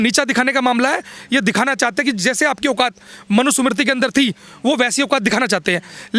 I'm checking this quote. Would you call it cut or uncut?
uncut